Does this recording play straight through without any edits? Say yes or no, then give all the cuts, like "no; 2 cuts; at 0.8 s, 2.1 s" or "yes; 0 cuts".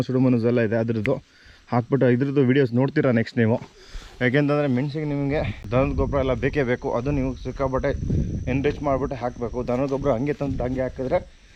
yes; 0 cuts